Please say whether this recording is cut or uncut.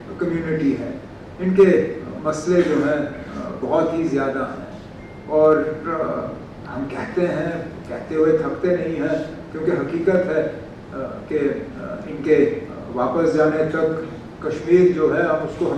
uncut